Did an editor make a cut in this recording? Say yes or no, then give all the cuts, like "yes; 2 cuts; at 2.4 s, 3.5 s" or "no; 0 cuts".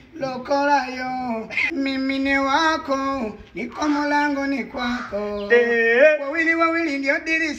yes; 1 cut; at 1.5 s